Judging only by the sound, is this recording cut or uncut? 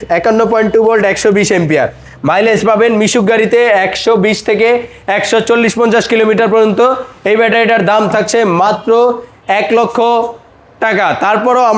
uncut